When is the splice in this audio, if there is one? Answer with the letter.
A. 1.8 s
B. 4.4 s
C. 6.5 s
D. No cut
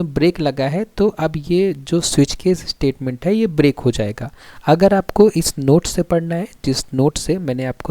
B